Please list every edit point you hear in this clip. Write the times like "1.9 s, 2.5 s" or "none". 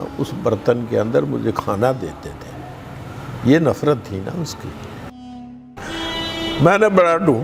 5.5 s